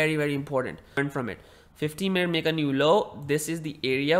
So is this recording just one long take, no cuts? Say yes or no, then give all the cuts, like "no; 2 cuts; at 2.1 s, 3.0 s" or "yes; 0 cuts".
no; 1 cut; at 1.0 s